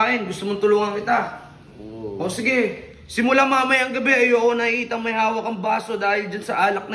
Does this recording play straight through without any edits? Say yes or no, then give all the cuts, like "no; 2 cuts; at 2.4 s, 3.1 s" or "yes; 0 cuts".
yes; 0 cuts